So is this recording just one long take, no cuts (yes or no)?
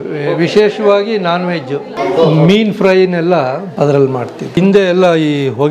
no